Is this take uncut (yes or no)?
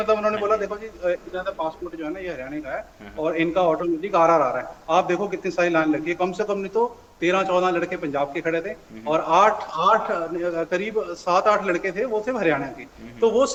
yes